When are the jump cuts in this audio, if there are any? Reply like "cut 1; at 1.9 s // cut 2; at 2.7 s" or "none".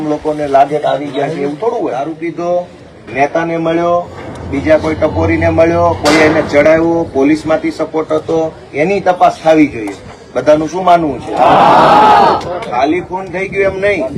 cut 1; at 2.1 s